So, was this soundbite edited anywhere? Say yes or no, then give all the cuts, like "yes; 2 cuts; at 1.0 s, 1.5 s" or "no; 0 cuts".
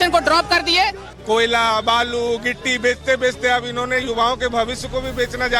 yes; 1 cut; at 1.1 s